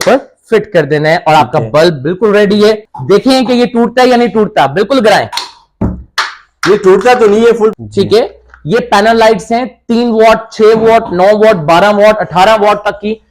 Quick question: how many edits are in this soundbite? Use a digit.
2